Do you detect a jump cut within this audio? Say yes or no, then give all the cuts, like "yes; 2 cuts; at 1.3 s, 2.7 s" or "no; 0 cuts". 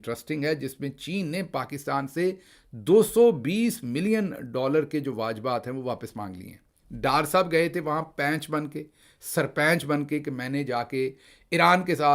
no; 0 cuts